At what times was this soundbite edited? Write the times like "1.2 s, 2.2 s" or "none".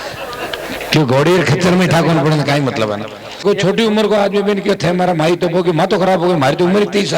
3.4 s

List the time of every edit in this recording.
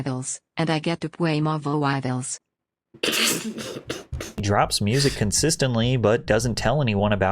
4.4 s

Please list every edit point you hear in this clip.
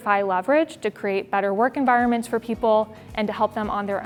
none

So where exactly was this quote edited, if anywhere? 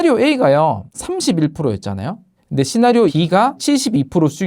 0.9 s, 3.6 s

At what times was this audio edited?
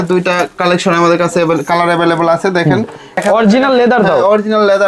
3.2 s

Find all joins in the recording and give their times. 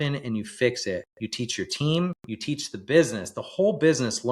1.2 s, 2.3 s

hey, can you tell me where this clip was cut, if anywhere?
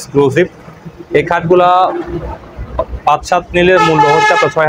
none

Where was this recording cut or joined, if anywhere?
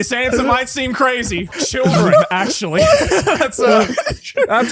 1.6 s

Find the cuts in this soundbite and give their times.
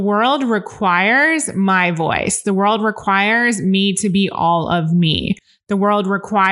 none

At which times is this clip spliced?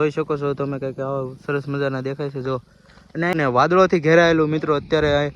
3.3 s

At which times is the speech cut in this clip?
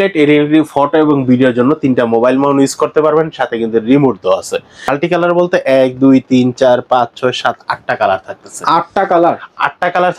4.8 s

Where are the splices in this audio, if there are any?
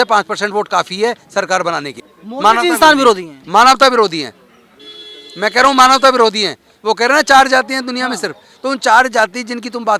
2.0 s

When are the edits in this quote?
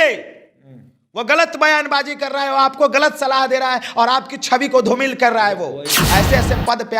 5.9 s

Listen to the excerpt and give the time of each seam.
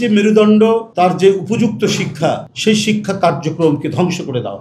0.9 s, 2.5 s

